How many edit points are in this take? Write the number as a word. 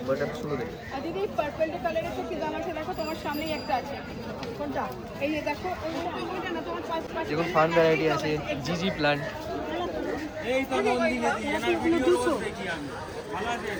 zero